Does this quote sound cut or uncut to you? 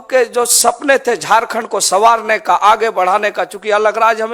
uncut